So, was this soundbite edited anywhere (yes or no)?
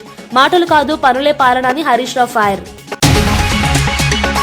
yes